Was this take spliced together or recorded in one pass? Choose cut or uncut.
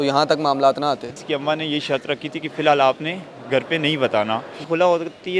cut